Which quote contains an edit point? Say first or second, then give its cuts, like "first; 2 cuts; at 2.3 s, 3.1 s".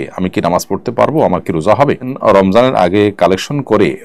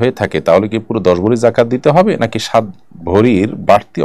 first; 1 cut; at 2.1 s